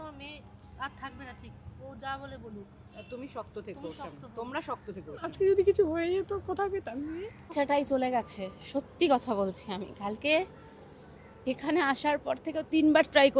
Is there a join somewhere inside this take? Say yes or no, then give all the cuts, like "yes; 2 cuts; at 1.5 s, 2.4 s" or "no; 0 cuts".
yes; 1 cut; at 7.5 s